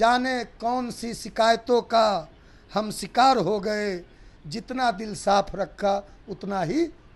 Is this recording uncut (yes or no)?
yes